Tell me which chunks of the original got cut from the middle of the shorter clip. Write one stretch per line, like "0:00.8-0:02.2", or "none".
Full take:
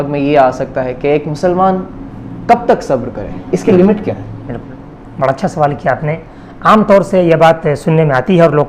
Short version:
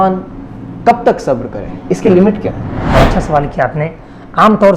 0:04.3-0:05.0